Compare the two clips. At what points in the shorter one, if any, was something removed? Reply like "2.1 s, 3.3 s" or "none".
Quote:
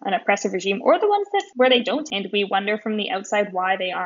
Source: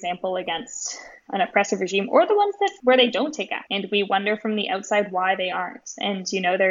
2.1 s